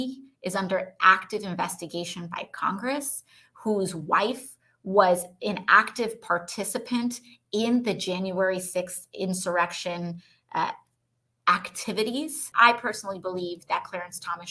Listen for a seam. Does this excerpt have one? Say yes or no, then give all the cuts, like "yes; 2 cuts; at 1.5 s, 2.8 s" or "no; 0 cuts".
yes; 1 cut; at 12.4 s